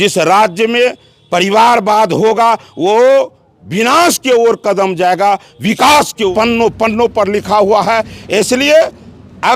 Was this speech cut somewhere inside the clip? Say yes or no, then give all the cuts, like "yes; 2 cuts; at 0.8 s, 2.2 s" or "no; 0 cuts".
yes; 1 cut; at 6.3 s